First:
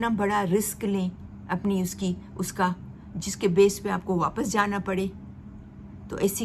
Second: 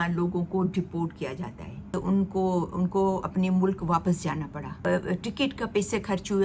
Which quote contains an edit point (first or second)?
second